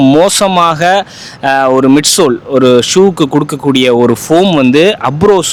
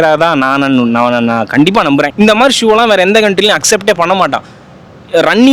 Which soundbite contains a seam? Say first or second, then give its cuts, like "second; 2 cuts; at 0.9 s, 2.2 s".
second; 1 cut; at 2.1 s